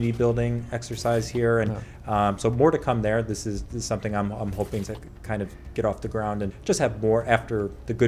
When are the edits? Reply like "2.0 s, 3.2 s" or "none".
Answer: 4.9 s, 6.6 s